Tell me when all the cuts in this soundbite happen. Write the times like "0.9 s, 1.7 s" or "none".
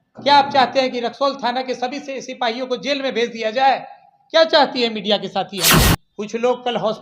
6.0 s